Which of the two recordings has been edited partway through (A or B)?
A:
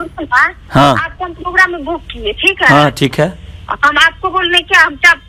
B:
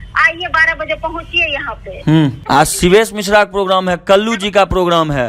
B